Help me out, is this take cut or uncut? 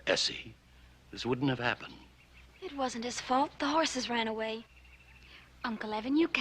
cut